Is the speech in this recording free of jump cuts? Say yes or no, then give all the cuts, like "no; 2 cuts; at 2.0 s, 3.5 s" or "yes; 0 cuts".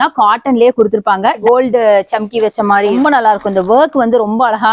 no; 1 cut; at 1.4 s